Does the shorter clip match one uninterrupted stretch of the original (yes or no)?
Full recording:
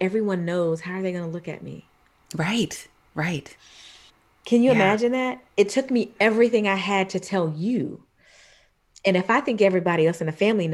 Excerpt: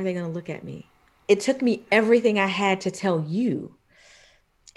no